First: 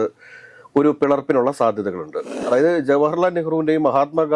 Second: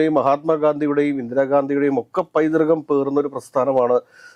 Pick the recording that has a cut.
first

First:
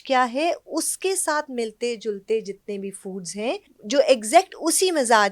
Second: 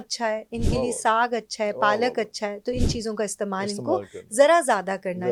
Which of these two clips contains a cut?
first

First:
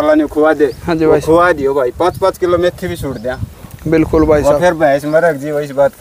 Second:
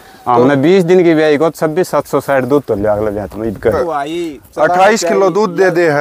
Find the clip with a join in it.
second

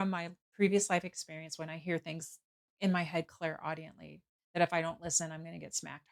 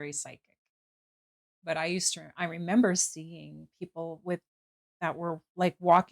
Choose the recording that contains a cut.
second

